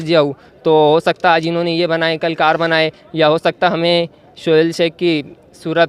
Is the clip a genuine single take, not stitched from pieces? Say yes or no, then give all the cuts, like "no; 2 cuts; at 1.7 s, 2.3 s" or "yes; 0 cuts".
yes; 0 cuts